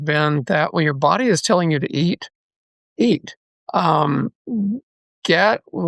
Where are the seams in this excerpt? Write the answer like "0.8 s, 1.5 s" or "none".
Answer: none